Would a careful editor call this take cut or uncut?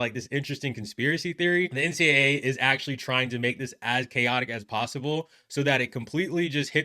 cut